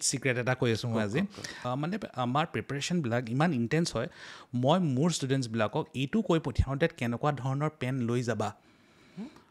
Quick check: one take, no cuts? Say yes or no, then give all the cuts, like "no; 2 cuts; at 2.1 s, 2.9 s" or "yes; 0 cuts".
no; 1 cut; at 1.5 s